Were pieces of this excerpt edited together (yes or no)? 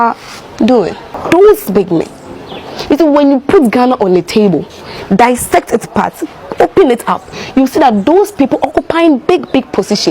yes